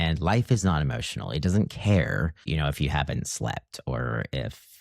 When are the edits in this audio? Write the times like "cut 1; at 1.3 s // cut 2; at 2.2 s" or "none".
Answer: cut 1; at 2.4 s